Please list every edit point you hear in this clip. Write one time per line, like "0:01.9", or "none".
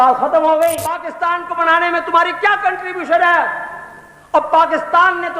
0:01.1